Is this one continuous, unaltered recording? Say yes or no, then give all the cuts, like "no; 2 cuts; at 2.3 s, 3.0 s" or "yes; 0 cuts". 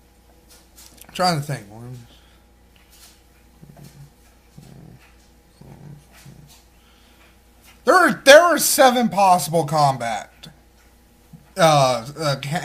no; 1 cut; at 3.1 s